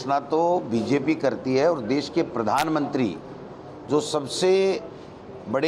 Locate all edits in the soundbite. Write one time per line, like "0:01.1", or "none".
none